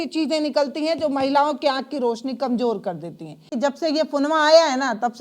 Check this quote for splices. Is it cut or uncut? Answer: cut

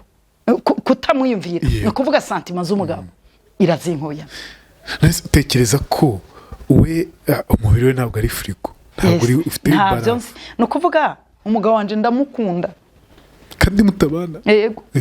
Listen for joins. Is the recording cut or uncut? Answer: cut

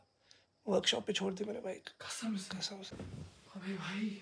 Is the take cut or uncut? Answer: cut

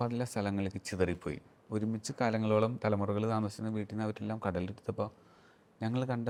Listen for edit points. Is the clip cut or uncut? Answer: uncut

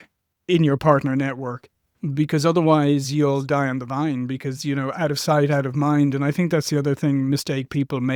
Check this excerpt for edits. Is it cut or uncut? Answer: uncut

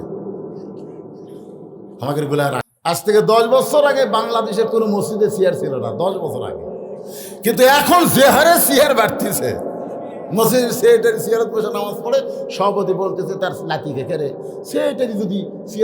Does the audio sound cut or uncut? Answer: cut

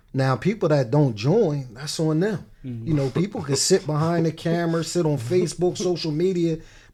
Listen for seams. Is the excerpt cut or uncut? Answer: uncut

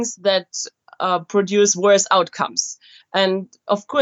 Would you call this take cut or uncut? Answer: uncut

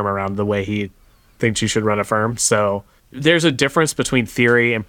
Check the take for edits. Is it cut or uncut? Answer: cut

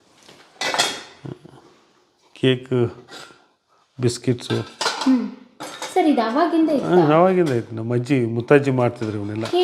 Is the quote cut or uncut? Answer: uncut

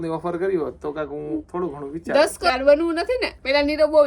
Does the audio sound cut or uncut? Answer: cut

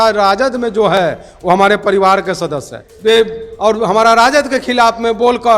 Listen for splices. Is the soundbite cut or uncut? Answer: cut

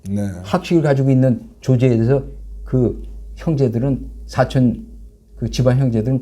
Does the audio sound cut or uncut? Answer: uncut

